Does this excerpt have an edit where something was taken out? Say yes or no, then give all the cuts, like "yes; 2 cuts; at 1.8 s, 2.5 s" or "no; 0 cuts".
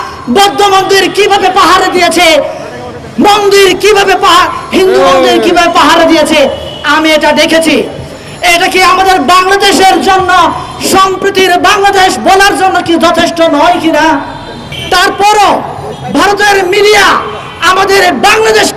no; 0 cuts